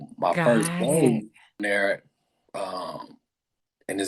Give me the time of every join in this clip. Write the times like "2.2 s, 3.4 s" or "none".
1.6 s